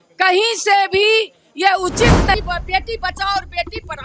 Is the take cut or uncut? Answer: cut